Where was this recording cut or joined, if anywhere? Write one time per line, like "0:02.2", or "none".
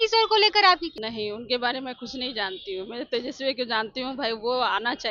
0:01.0